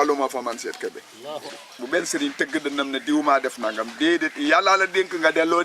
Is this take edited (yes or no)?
yes